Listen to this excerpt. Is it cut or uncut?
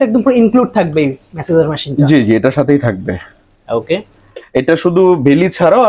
uncut